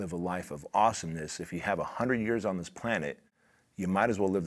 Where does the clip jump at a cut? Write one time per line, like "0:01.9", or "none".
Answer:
none